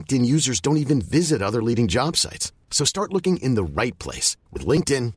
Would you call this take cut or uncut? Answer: uncut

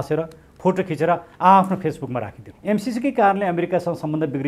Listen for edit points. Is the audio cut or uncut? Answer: cut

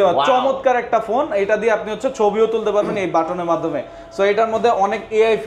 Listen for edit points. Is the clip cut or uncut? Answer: uncut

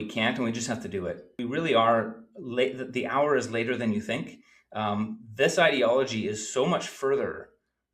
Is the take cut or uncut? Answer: cut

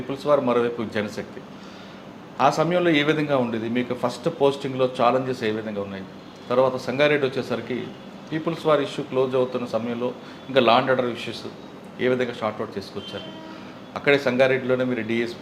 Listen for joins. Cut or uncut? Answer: uncut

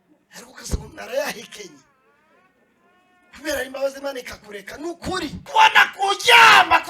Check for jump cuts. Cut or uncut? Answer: cut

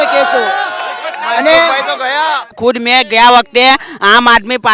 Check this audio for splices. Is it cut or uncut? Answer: cut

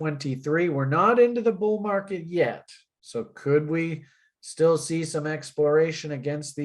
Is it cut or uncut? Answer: uncut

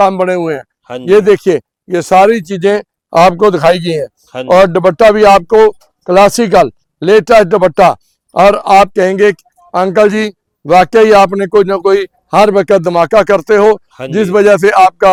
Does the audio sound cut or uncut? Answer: uncut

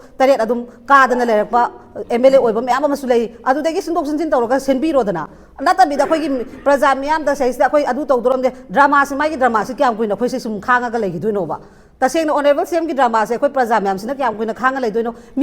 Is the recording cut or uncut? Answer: uncut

